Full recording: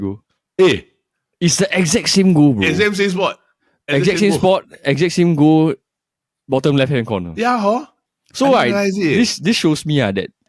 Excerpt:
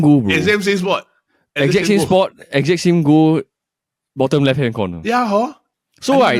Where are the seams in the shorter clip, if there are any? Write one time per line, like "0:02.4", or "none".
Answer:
none